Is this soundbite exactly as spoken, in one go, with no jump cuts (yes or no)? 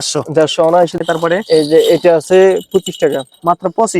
no